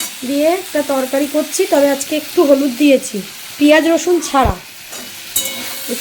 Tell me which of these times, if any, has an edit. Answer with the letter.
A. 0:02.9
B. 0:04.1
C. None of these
C